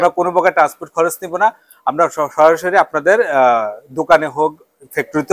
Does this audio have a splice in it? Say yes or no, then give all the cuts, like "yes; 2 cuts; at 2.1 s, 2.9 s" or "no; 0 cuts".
no; 0 cuts